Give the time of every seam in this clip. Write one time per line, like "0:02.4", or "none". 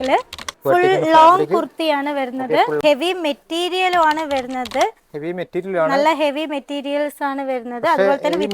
0:02.8